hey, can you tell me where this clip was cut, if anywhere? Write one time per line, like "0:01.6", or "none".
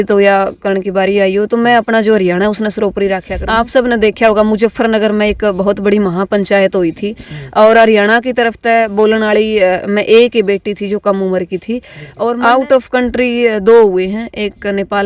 0:03.4
0:12.0